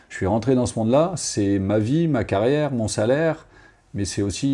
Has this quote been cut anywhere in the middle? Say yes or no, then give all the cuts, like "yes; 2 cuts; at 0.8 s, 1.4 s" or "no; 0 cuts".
no; 0 cuts